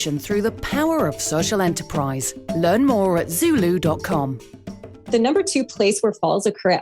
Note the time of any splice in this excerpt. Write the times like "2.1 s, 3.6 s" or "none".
5.0 s